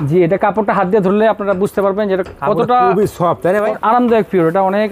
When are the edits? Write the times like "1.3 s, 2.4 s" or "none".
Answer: 3.8 s